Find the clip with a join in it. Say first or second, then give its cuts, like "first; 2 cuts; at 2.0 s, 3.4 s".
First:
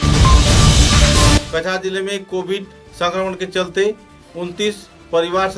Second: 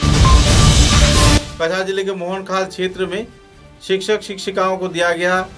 second; 1 cut; at 1.5 s